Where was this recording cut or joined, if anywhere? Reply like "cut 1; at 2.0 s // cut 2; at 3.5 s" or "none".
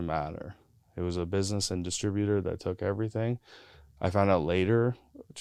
none